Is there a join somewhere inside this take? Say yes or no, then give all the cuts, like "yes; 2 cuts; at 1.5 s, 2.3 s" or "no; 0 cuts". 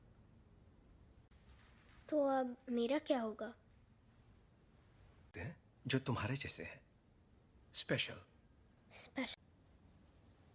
no; 0 cuts